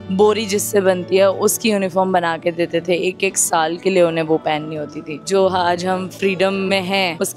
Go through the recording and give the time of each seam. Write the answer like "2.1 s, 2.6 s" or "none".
none